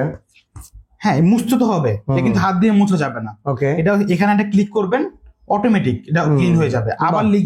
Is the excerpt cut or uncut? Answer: uncut